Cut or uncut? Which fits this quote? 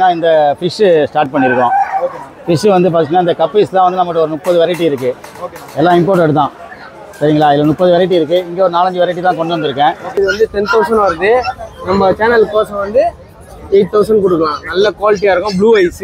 cut